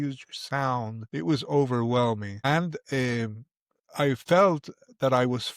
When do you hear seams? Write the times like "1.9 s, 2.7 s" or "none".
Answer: 1.0 s, 2.4 s